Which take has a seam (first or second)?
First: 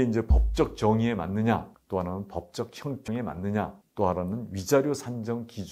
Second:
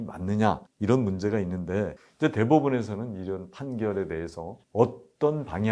second